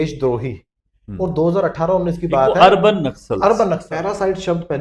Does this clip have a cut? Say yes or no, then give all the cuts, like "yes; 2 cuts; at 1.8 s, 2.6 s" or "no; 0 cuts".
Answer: yes; 1 cut; at 3.9 s